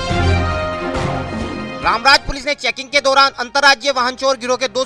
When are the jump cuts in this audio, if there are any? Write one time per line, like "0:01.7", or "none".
0:01.7